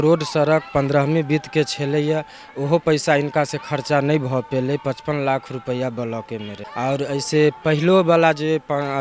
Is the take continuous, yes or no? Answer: no